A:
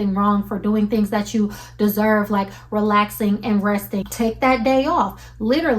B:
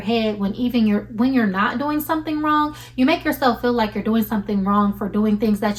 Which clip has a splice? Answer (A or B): A